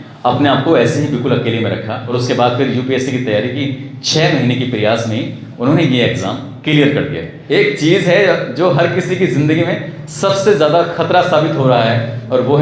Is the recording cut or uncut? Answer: cut